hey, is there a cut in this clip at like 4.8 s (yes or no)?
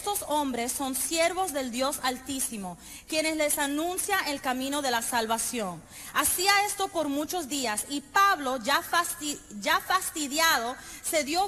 no